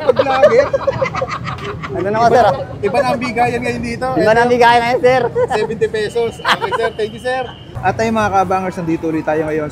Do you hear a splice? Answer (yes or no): no